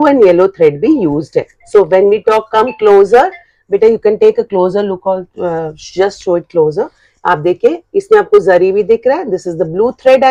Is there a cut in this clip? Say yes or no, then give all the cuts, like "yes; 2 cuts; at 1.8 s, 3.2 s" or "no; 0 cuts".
no; 0 cuts